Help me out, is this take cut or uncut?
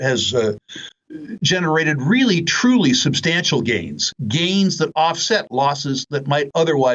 uncut